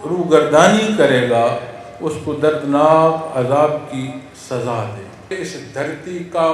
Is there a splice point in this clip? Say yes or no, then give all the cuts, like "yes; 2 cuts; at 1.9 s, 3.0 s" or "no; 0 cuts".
yes; 1 cut; at 5.3 s